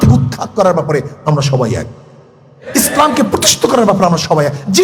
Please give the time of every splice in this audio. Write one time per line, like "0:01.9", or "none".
none